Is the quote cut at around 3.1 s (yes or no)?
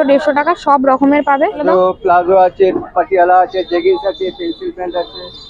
no